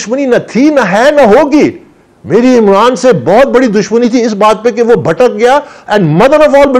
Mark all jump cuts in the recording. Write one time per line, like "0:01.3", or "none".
none